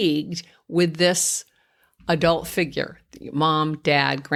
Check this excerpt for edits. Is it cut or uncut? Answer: uncut